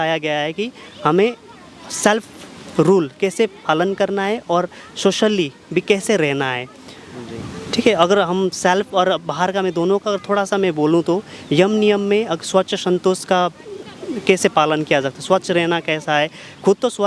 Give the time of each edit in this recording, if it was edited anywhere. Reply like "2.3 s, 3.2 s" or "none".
none

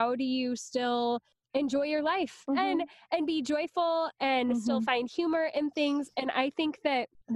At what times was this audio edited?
2.5 s

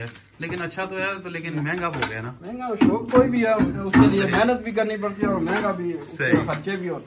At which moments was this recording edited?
none

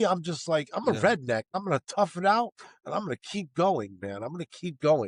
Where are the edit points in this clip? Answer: 1.5 s

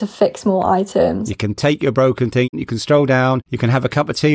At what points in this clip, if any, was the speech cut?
1.3 s

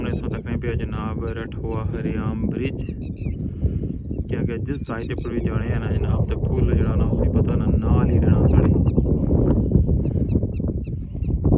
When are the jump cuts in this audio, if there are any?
none

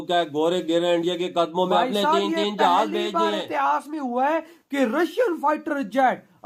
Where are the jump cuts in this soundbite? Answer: none

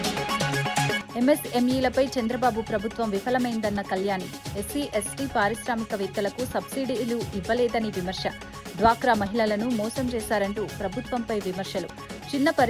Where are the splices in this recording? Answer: 1.0 s

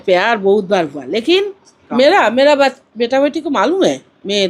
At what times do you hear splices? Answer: 1.7 s

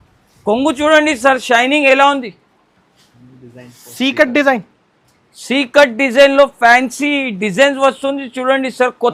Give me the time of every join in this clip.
none

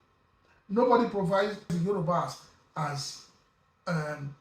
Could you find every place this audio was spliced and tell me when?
1.7 s

